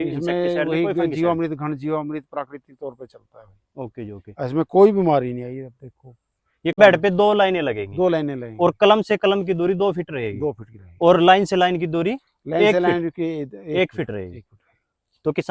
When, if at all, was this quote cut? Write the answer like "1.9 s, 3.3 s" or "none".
6.8 s